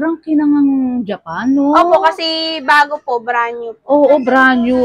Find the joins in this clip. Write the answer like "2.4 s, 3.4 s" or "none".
none